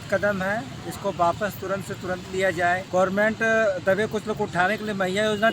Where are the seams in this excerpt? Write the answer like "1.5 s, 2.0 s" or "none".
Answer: 2.8 s